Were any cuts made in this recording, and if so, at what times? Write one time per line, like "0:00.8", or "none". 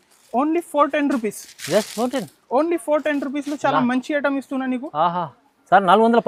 none